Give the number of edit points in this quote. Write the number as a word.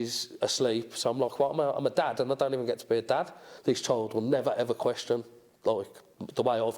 one